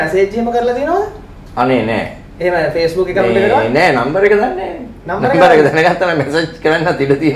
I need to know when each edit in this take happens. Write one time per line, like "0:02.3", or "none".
none